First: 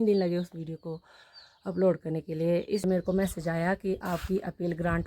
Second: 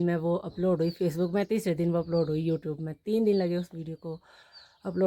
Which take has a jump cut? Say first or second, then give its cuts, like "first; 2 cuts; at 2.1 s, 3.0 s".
first; 1 cut; at 2.8 s